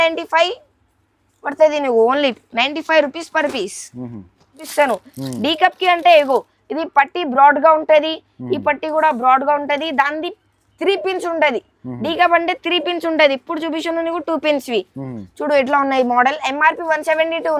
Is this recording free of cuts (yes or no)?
no